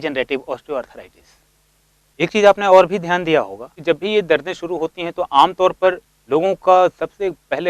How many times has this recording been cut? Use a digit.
2